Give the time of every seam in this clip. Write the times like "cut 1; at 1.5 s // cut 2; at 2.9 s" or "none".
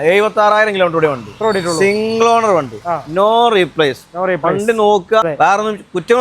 cut 1; at 5.2 s